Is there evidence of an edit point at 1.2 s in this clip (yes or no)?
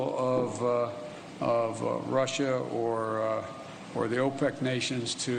no